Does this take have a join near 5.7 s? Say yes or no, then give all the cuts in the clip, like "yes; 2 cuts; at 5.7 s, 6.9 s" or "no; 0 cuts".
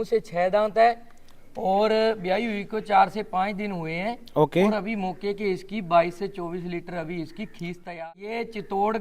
no; 1 cut; at 7.9 s